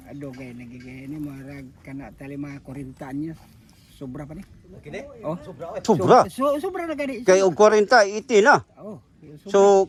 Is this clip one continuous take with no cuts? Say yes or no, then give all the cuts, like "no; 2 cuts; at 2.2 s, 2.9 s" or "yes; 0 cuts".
yes; 0 cuts